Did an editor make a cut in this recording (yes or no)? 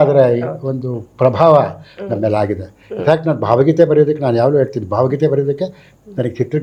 no